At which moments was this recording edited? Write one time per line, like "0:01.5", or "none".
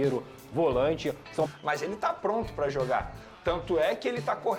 0:01.5